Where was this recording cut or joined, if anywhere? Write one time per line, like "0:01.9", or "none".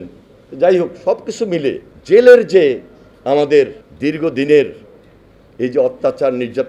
0:01.9
0:03.8